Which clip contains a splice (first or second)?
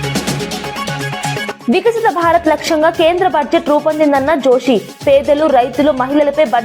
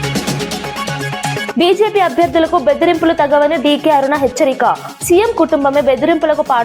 second